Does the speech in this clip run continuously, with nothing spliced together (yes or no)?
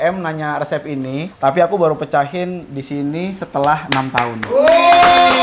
yes